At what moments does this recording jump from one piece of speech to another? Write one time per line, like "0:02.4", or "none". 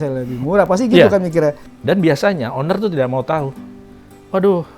0:01.7